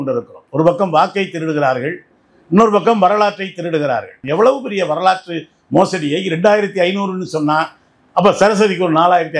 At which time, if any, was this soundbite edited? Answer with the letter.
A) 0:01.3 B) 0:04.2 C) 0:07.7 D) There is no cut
B